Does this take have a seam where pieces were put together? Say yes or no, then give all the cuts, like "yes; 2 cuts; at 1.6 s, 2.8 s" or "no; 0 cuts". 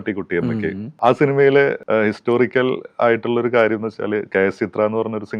yes; 2 cuts; at 0.9 s, 1.8 s